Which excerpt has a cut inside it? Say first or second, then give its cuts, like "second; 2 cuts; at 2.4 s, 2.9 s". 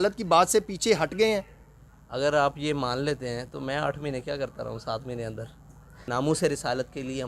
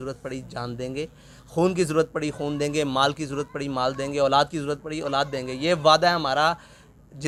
first; 1 cut; at 6.0 s